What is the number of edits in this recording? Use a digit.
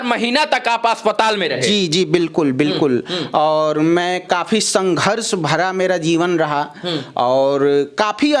0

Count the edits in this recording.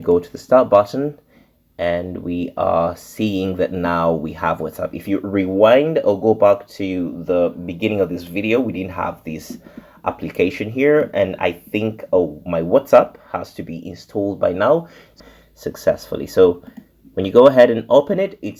1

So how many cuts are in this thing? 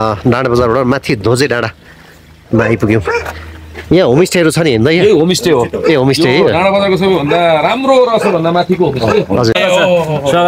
1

